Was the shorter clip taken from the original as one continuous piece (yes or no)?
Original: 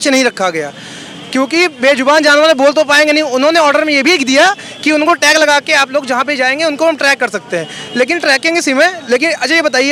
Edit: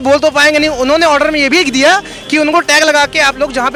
yes